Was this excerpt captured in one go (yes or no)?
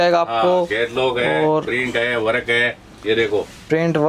yes